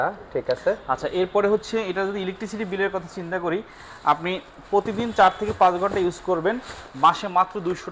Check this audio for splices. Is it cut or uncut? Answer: uncut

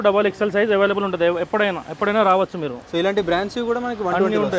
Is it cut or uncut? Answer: uncut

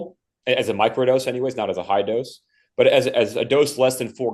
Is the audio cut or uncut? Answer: uncut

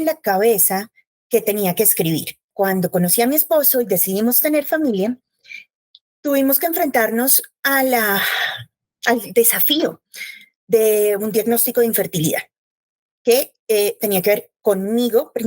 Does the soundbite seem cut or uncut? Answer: cut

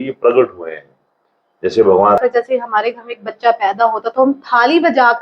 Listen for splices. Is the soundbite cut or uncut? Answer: cut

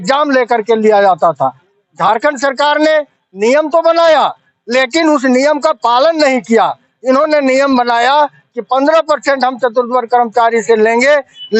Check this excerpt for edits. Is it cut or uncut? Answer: uncut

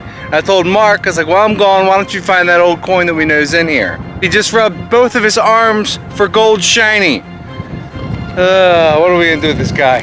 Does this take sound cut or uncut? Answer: cut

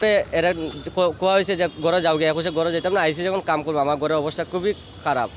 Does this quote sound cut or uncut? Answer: uncut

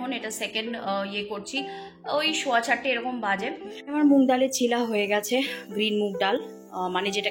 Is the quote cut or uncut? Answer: cut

